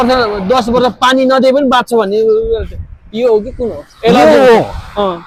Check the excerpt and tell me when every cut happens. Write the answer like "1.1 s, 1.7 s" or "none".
none